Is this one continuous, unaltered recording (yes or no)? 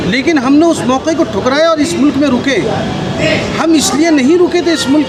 yes